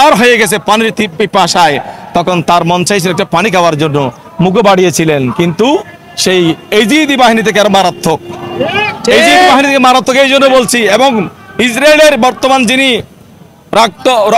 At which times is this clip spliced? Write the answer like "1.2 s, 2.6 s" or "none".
none